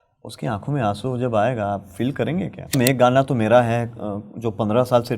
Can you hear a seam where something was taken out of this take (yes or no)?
yes